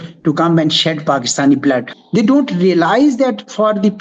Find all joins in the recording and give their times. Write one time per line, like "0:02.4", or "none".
0:01.9